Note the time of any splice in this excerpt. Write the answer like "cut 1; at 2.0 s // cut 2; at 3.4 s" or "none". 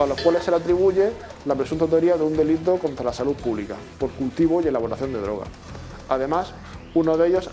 none